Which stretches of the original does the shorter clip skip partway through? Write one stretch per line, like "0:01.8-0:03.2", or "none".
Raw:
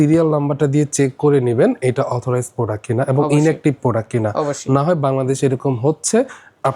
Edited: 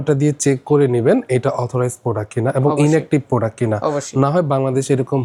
none